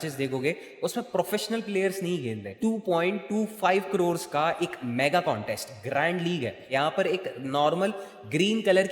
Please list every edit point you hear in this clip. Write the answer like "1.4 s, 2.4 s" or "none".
2.6 s, 6.7 s